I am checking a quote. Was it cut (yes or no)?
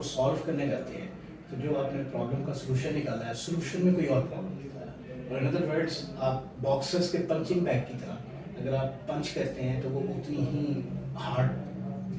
no